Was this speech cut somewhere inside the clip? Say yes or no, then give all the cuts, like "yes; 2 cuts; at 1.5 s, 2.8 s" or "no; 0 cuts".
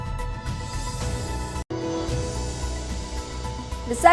no; 0 cuts